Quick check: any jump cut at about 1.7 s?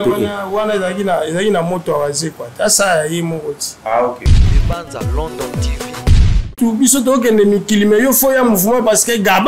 no; 2 cuts; at 4.3 s, 6.5 s

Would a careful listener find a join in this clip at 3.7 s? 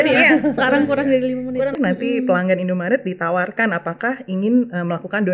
no; 1 cut; at 1.7 s

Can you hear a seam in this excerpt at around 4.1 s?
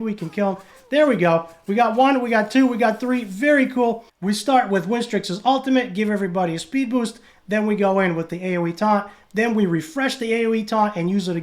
yes; 1 cut; at 4.1 s

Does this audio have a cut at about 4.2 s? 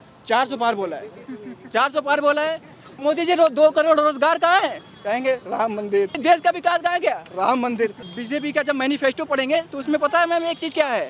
no; 3 cuts; at 3.0 s, 6.2 s, 8.0 s

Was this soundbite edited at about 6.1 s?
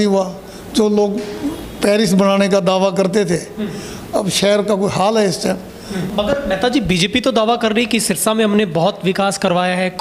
yes; 1 cut; at 6.1 s

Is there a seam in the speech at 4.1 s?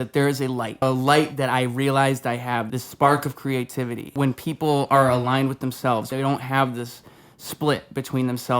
yes; 4 cuts; at 0.8 s, 2.8 s, 4.1 s, 6.1 s

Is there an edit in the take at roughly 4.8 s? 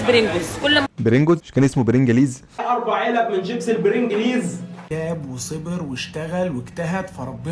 yes; 1 cut; at 4.8 s

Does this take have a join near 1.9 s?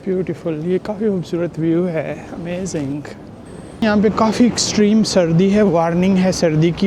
no; 1 cut; at 3.8 s

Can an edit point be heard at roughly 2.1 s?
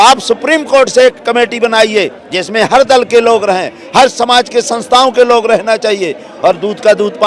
no; 0 cuts

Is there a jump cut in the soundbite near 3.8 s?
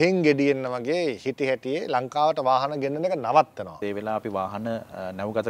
yes; 1 cut; at 3.8 s

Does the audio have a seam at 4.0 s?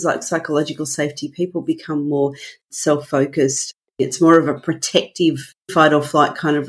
yes; 3 cuts; at 2.7 s, 4.0 s, 5.7 s

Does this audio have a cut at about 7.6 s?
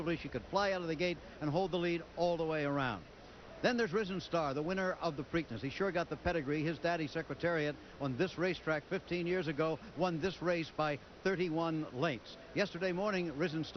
yes; 1 cut; at 7.6 s

